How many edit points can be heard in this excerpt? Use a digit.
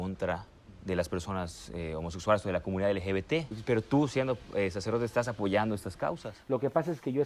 2